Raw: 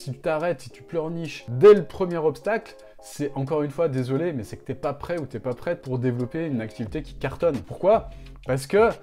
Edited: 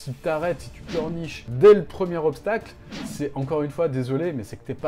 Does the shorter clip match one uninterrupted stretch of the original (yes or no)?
yes